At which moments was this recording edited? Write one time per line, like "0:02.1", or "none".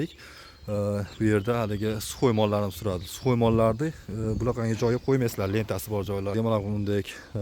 0:06.3